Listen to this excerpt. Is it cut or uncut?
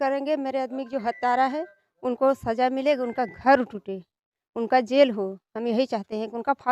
uncut